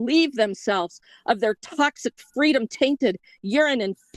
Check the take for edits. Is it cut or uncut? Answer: uncut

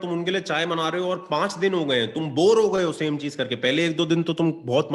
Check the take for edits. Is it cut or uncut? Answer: uncut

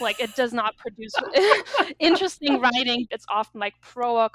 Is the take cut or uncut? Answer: cut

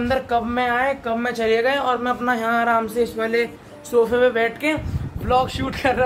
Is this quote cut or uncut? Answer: uncut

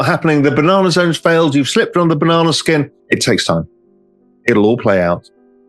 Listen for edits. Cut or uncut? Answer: cut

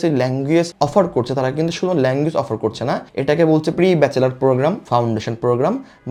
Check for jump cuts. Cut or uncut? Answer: uncut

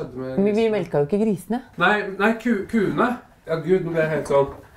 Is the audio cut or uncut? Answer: cut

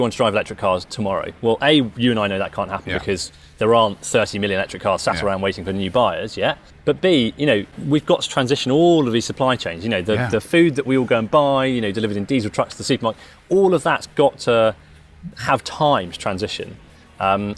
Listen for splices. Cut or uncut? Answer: cut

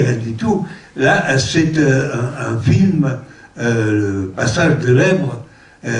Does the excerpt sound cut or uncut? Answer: cut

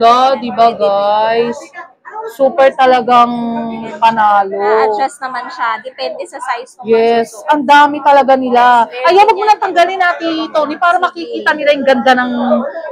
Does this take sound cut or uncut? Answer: uncut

